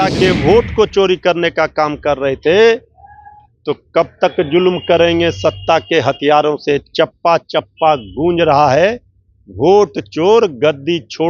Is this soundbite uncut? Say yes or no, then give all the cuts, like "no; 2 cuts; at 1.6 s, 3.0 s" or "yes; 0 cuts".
yes; 0 cuts